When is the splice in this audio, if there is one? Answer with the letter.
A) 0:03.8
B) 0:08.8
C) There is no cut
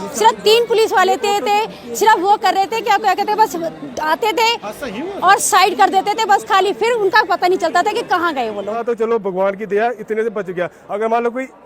B